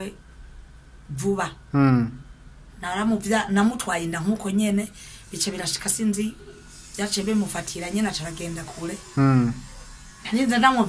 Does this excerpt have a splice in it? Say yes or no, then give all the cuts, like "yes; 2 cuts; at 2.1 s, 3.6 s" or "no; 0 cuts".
no; 0 cuts